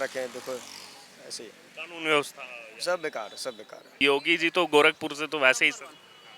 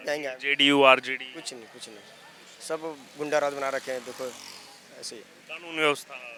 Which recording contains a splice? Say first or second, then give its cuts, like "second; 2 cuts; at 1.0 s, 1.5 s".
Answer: first; 1 cut; at 4.0 s